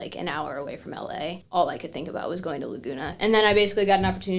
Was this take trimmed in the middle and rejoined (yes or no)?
yes